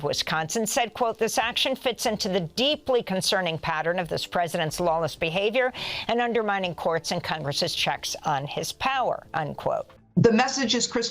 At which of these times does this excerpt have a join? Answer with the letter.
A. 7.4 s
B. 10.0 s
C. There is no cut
B